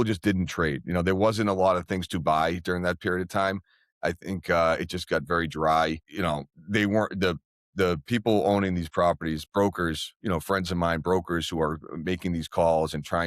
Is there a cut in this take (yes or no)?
yes